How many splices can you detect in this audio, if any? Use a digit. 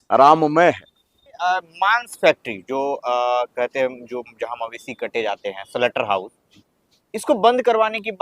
1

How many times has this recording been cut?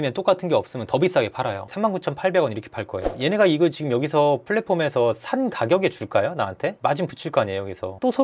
1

